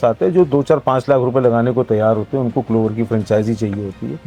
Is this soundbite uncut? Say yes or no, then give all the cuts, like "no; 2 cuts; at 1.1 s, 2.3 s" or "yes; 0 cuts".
yes; 0 cuts